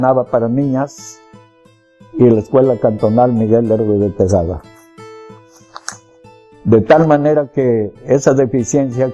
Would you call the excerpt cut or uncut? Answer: uncut